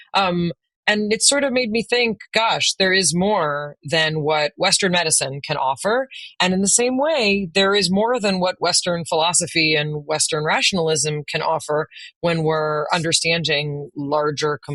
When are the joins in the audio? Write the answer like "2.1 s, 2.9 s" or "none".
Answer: none